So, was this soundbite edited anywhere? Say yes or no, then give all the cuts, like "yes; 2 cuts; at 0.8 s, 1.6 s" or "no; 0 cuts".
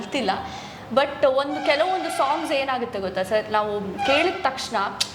no; 0 cuts